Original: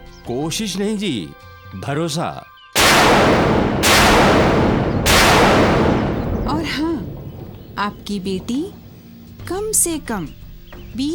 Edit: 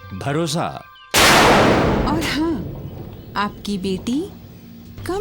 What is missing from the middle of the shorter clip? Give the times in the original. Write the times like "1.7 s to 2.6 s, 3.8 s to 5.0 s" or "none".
3.6 s to 6.4 s